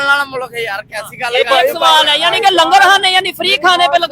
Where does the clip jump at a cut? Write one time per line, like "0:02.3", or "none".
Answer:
none